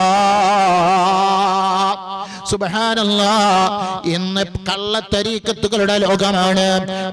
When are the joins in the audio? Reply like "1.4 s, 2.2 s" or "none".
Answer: none